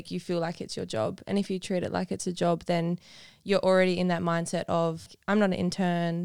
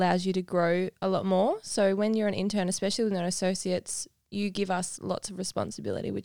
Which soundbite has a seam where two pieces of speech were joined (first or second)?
first